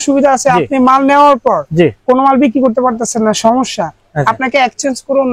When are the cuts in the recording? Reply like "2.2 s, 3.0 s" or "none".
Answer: none